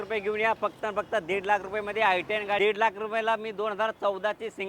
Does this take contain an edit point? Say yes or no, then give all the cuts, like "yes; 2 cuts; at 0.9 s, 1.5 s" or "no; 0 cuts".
yes; 1 cut; at 2.6 s